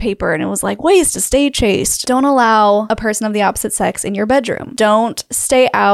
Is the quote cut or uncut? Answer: cut